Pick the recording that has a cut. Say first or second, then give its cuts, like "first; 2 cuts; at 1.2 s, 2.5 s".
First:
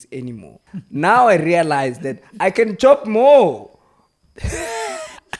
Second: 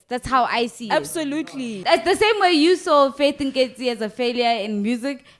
second; 1 cut; at 1.7 s